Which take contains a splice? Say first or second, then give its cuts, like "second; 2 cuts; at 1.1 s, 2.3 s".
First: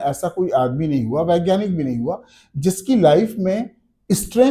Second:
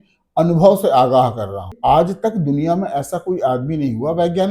second; 1 cut; at 1.7 s